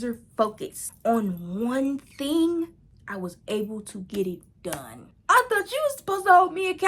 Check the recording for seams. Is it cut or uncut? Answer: cut